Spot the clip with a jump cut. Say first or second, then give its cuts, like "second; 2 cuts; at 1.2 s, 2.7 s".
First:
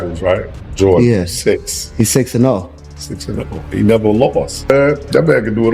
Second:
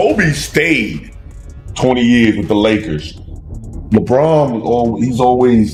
first; 1 cut; at 4.6 s